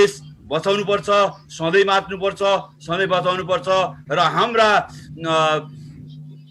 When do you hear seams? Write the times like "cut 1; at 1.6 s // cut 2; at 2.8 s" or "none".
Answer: none

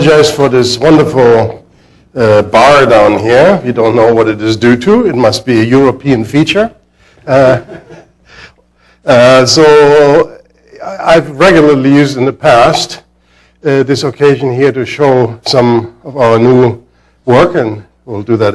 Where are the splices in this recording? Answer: none

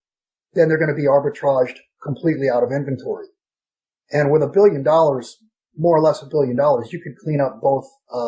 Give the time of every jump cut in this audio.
none

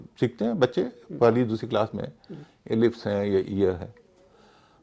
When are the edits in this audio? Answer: none

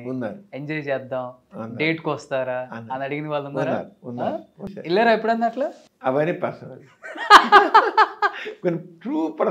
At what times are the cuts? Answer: cut 1; at 4.7 s // cut 2; at 5.8 s

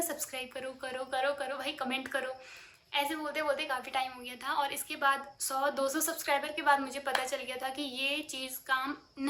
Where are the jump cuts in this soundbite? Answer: none

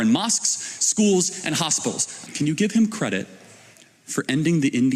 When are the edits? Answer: cut 1; at 2.2 s

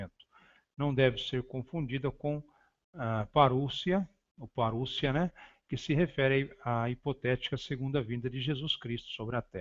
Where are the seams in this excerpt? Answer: none

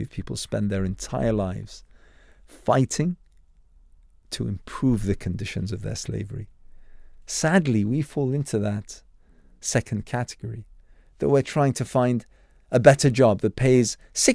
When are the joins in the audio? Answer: none

